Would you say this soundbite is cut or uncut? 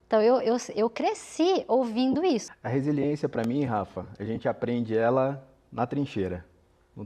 cut